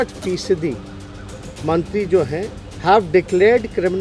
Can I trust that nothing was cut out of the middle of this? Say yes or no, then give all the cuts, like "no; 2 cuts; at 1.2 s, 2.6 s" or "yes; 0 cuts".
no; 1 cut; at 2.6 s